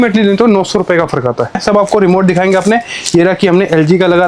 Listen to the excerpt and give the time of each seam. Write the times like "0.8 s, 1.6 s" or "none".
1.6 s